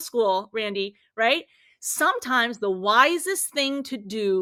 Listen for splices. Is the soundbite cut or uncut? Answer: uncut